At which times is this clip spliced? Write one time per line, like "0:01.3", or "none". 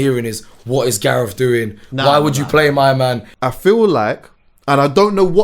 0:03.3